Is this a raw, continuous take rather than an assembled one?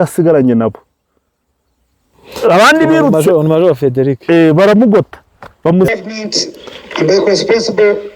no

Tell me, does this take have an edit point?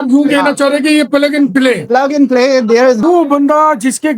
yes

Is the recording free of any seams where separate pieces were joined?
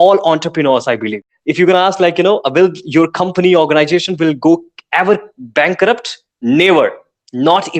no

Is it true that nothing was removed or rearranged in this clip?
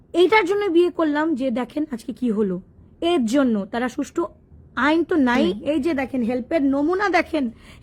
no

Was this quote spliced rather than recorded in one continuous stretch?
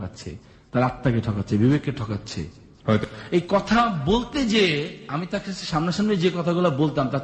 yes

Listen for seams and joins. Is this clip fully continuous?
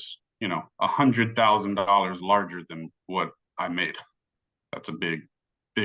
yes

